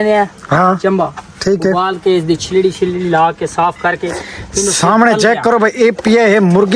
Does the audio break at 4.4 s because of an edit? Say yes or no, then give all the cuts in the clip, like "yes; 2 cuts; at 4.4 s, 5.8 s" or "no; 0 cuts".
no; 0 cuts